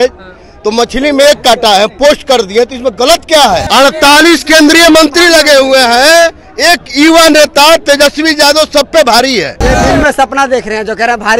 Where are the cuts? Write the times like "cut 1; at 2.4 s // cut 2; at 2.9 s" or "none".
cut 1; at 3.7 s // cut 2; at 9.6 s